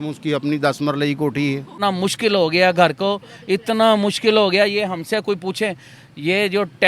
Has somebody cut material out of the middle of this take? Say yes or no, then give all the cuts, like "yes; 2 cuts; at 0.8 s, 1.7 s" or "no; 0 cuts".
yes; 1 cut; at 1.8 s